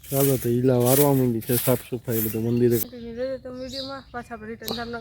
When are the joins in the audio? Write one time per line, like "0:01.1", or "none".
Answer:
0:02.8